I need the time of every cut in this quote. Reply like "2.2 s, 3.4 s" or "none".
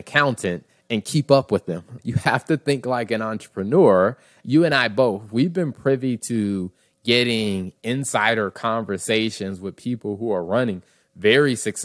1.9 s, 4.4 s